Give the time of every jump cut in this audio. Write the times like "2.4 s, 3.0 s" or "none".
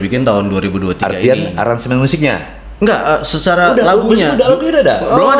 none